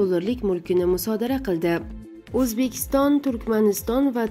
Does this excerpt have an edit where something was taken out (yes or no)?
yes